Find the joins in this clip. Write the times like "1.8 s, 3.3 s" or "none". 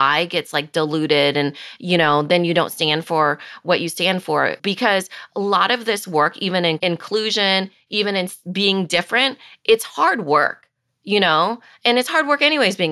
6.8 s

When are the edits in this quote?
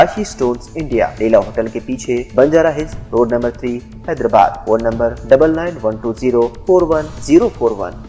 none

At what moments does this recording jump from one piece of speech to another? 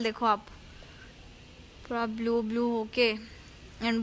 none

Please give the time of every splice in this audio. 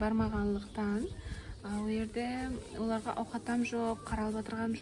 none

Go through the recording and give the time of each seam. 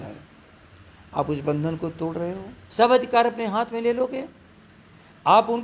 2.5 s

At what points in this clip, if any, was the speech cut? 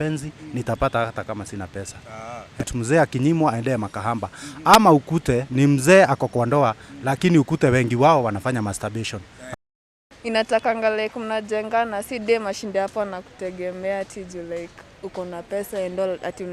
2.7 s, 9.5 s

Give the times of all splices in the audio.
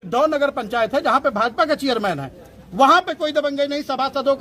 none

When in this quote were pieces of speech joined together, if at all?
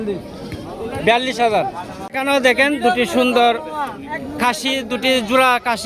2.1 s

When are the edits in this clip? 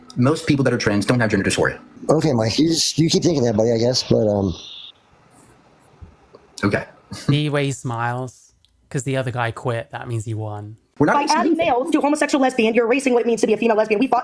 1.9 s, 10.8 s

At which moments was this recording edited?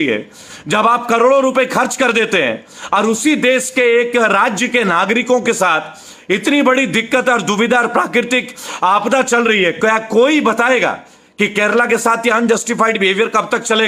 none

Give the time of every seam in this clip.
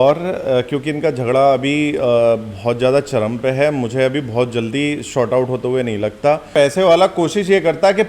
6.5 s

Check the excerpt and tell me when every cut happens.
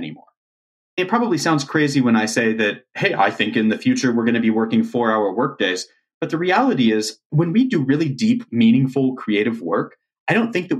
0.9 s, 7.2 s, 8.5 s

